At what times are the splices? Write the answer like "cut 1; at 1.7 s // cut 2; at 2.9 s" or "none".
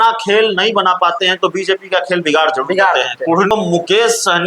cut 1; at 3.5 s